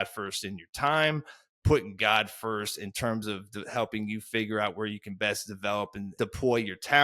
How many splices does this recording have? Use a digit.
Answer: 1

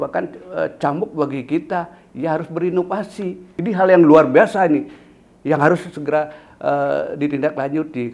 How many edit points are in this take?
1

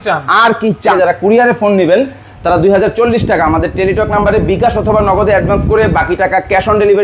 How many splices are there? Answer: 1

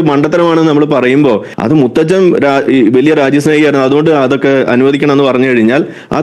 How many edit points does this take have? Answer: 1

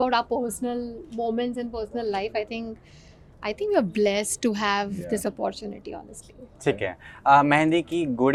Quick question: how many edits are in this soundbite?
0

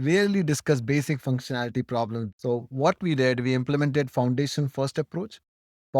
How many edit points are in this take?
1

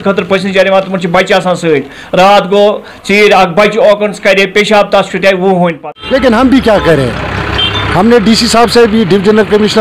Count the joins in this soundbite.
1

